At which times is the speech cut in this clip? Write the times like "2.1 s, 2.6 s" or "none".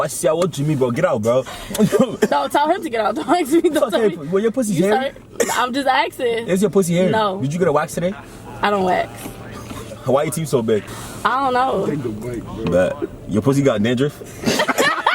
9.9 s, 11.0 s